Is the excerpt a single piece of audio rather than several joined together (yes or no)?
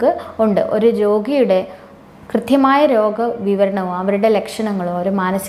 yes